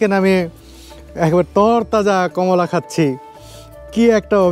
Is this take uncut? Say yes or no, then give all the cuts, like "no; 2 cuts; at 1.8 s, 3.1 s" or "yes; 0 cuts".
yes; 0 cuts